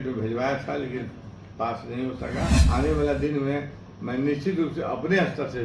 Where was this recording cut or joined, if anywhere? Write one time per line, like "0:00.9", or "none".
0:02.6

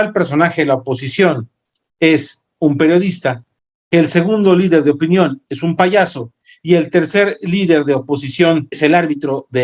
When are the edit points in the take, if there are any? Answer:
0:08.6

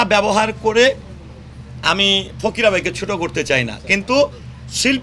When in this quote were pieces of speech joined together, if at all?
none

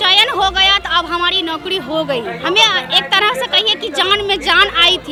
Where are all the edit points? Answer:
none

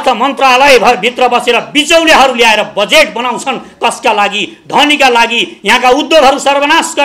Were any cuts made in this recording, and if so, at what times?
none

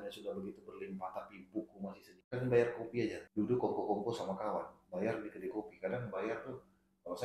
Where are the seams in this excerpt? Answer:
0:02.1
0:03.2

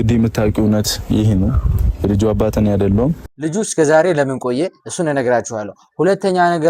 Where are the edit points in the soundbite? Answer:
0:03.3

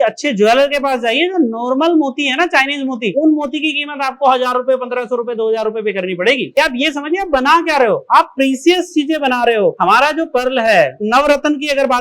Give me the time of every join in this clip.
0:06.5
0:11.0

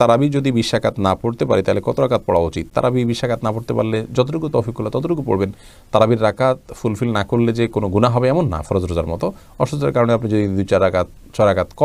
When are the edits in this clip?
none

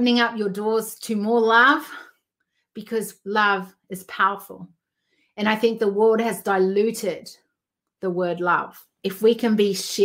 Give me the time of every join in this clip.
0:08.9

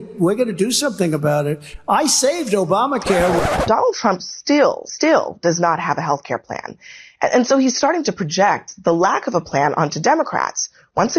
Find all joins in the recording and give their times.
0:03.4
0:04.9

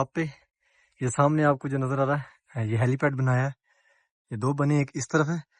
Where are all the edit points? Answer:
none

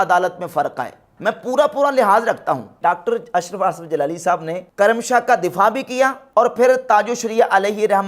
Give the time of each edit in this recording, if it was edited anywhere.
0:01.1
0:02.7
0:06.2

